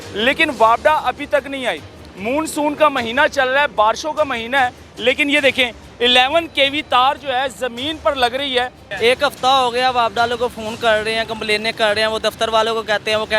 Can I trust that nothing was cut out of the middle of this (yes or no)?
no